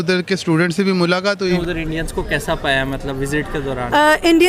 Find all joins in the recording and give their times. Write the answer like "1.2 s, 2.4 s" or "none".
1.6 s